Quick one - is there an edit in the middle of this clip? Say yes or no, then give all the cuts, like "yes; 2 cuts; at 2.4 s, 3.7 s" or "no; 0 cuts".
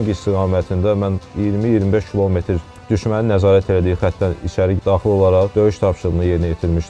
yes; 2 cuts; at 1.2 s, 5.5 s